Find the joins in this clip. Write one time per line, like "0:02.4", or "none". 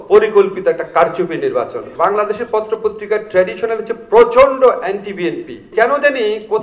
0:01.9
0:05.7